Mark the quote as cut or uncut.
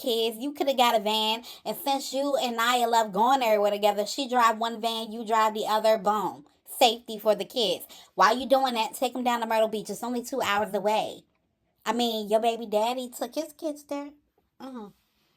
uncut